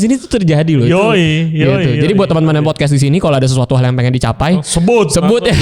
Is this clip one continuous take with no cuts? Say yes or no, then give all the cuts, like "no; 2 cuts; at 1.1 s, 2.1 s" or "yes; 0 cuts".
yes; 0 cuts